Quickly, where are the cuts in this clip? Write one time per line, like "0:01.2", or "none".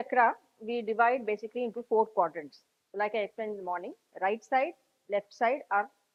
none